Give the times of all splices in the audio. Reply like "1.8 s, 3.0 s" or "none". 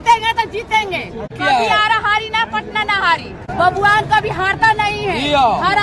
1.3 s, 3.4 s

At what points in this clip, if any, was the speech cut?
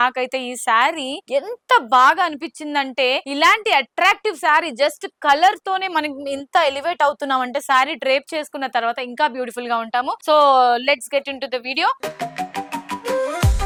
none

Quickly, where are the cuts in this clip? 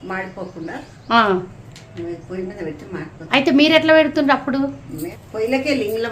none

